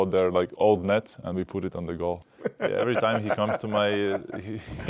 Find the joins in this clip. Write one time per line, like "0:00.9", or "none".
0:01.2
0:02.3